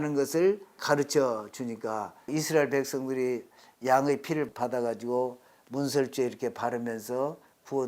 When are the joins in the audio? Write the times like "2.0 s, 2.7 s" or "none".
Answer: 0.8 s, 2.3 s, 4.5 s